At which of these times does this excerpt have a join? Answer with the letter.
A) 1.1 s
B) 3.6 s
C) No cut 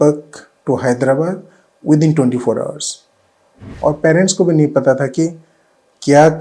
B